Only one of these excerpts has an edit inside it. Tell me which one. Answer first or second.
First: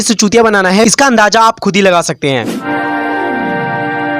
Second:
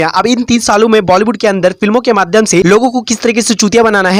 first